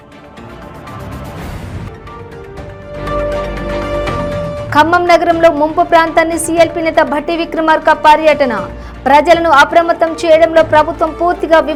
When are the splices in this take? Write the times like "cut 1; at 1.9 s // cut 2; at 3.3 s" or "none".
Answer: none